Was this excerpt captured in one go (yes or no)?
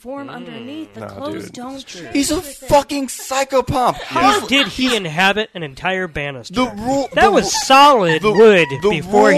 yes